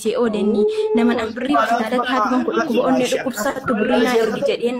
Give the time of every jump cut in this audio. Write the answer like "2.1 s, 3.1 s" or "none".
none